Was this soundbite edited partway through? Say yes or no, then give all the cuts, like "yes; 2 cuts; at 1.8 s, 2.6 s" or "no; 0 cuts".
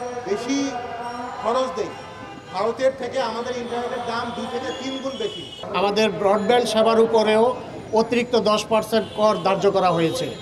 yes; 1 cut; at 5.6 s